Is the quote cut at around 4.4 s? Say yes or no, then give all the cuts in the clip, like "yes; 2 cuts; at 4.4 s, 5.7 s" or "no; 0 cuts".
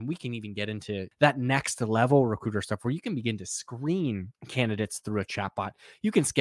yes; 2 cuts; at 1.1 s, 4.4 s